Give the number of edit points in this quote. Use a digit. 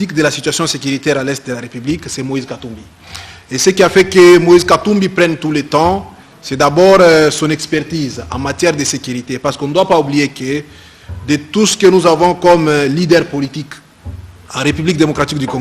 1